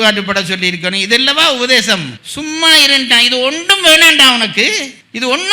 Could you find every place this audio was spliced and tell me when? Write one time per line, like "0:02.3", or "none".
none